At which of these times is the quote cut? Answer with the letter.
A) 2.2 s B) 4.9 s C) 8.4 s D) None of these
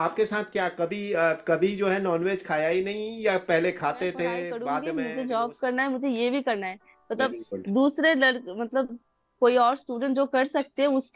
B